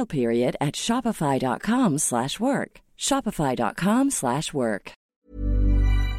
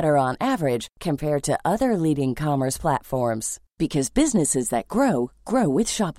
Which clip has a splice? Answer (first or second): first